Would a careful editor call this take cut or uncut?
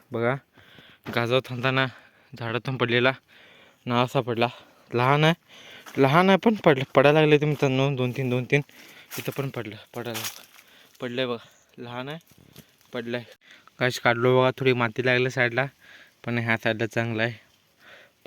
cut